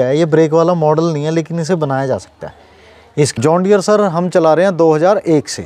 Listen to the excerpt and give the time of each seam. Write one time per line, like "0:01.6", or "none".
0:03.3